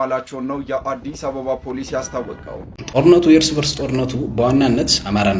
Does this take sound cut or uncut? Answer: cut